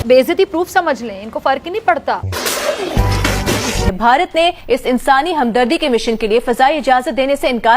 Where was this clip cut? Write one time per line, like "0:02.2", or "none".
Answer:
0:03.9